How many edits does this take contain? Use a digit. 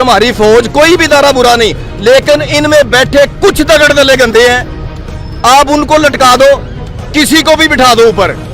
0